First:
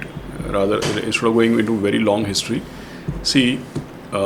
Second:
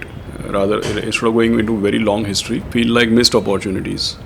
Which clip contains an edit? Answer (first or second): second